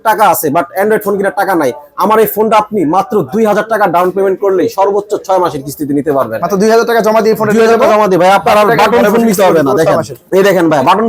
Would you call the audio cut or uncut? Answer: uncut